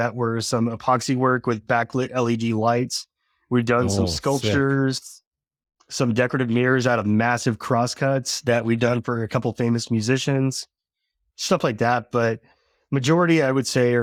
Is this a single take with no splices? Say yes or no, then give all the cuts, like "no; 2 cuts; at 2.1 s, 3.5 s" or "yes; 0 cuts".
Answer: yes; 0 cuts